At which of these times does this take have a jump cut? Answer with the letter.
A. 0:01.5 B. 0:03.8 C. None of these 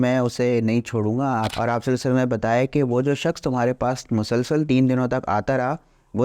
A